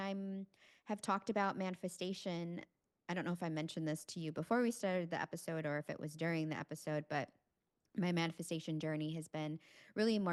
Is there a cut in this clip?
no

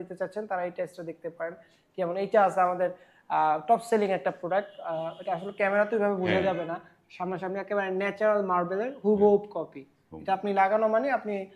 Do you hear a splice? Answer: no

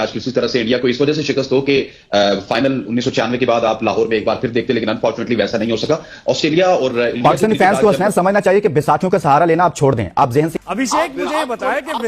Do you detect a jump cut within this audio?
yes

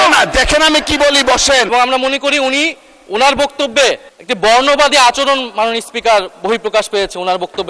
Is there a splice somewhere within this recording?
yes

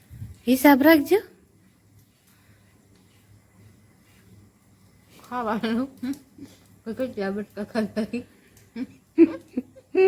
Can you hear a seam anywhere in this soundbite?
no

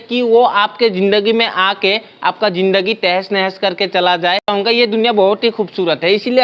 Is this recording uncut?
no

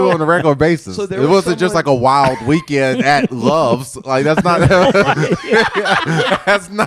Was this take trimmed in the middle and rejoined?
no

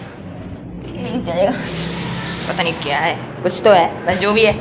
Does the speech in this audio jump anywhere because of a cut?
no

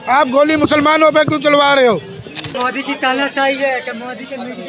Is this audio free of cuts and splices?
no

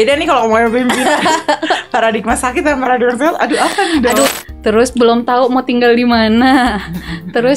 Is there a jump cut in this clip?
yes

